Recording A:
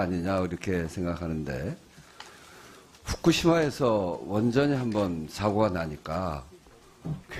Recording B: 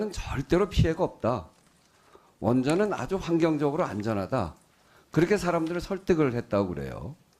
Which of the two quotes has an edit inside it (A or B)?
B